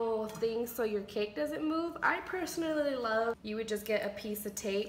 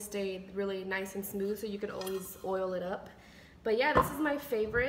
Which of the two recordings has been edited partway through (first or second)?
first